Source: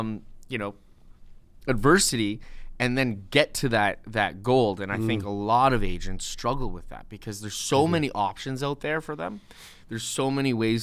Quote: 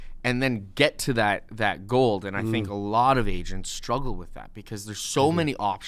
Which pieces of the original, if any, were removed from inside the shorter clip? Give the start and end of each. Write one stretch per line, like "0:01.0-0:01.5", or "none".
none

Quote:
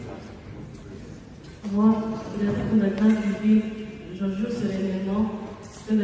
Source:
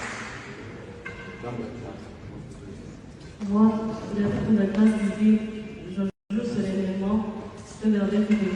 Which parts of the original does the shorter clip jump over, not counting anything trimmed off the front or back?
0:06.1-0:06.3

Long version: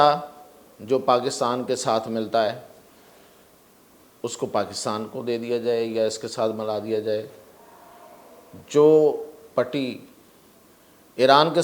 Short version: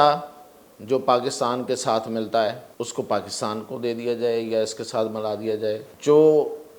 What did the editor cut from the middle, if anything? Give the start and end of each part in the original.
0:02.6-0:04.1
0:07.3-0:08.6

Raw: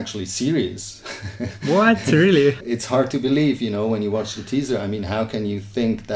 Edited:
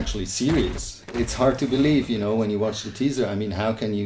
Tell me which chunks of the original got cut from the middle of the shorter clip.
0:01.2-0:02.7

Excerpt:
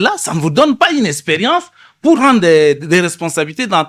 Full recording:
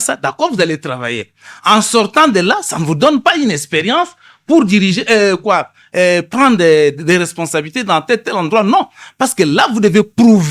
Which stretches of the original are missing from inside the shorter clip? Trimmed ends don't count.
0:04.6-0:06.3

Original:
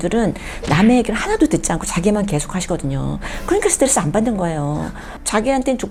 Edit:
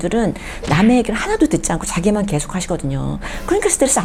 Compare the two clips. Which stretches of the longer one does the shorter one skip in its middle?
none

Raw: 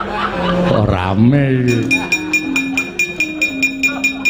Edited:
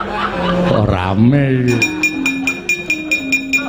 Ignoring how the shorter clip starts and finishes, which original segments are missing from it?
0:01.8-0:02.1

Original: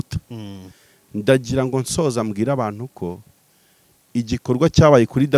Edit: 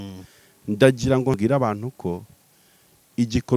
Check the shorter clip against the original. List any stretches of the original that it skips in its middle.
0:01.8-0:02.3

